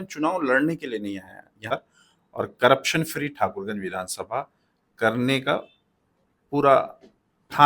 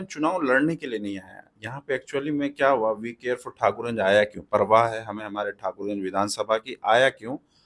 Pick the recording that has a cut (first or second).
first